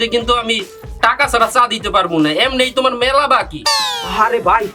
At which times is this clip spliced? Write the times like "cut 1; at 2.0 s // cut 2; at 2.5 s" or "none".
none